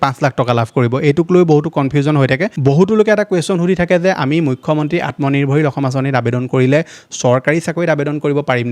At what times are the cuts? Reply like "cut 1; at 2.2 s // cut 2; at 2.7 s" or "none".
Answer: cut 1; at 2.5 s